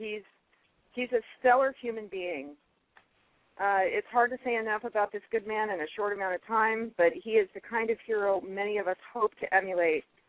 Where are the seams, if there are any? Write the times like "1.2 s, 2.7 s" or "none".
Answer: 2.7 s